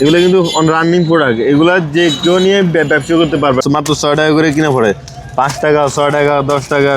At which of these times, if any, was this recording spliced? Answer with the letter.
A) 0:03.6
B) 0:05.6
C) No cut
A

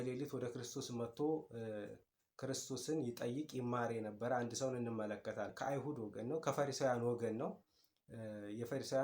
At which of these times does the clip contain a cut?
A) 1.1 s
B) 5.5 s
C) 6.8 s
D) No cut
B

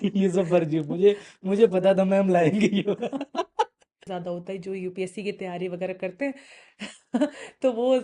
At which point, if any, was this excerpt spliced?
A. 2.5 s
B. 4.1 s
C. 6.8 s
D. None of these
B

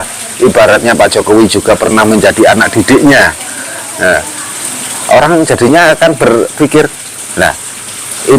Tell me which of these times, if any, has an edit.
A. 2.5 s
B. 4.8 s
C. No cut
C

